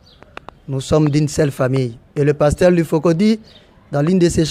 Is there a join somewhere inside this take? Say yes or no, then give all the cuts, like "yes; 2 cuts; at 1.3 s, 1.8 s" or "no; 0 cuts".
no; 0 cuts